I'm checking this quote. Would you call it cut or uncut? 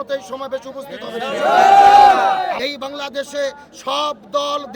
cut